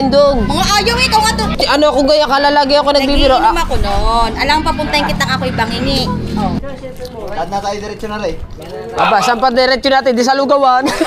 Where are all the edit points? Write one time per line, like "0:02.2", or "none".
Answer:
0:01.5
0:06.6